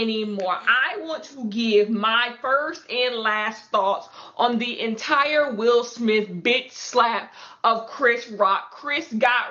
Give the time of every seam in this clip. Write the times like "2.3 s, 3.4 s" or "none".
none